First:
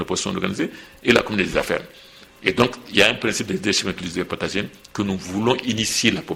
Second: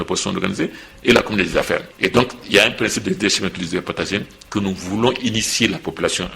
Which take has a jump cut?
second; 1 cut; at 1.9 s

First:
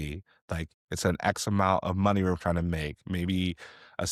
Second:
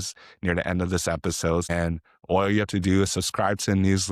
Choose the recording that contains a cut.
second; 1 cut; at 1.7 s

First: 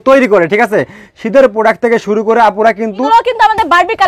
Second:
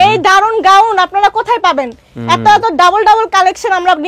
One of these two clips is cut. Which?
first; 1 cut; at 3.0 s

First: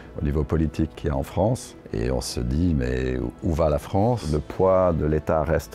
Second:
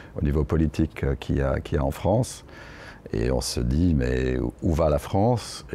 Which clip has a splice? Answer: first; 3 cuts; at 1.0 s, 1.7 s, 4.3 s

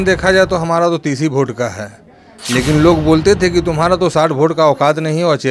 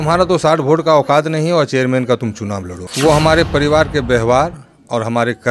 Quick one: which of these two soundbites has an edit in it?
second; 1 cut; at 2.8 s

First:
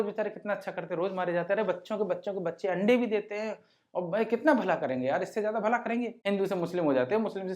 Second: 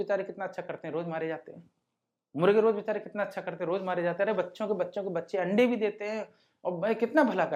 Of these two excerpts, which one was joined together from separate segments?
first; 1 cut; at 6.1 s

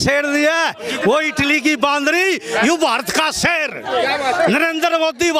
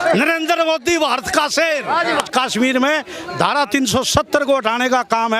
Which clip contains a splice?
second; 1 cut; at 2.1 s

